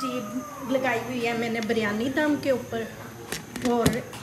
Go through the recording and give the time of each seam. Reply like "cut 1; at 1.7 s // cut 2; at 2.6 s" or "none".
none